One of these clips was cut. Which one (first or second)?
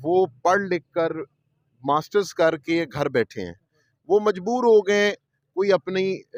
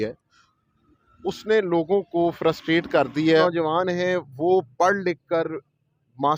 second